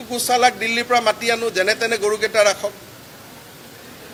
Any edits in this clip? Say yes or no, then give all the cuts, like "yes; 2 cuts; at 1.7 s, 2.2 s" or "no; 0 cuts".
no; 0 cuts